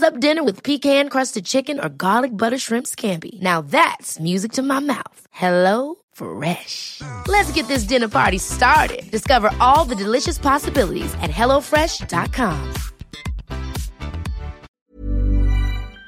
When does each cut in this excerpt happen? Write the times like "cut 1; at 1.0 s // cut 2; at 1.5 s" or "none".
cut 1; at 14.7 s